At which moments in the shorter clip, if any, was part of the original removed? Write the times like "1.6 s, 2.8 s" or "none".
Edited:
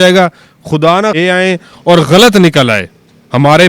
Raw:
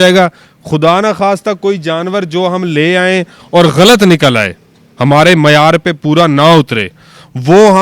1.2 s